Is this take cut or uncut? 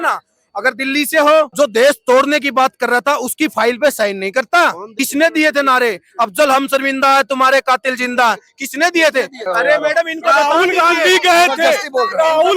cut